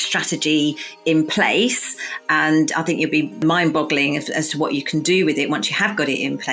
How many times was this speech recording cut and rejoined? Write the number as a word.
one